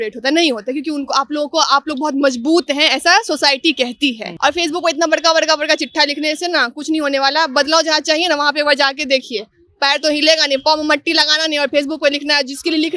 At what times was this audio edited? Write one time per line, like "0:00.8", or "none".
0:04.3